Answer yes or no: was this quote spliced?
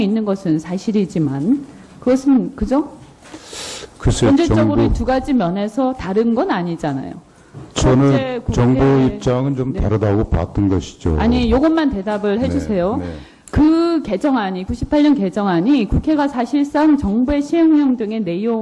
no